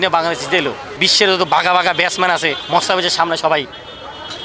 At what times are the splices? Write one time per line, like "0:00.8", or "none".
0:01.1
0:02.6